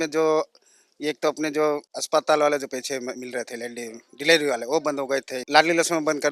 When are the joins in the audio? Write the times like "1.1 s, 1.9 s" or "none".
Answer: 1.9 s, 5.4 s